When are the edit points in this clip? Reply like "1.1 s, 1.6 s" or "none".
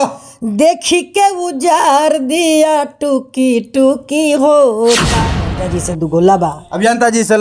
5.2 s